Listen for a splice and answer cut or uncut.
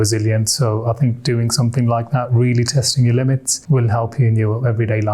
cut